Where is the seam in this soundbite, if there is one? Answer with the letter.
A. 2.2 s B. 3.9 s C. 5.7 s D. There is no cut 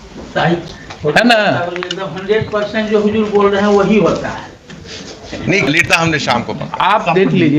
C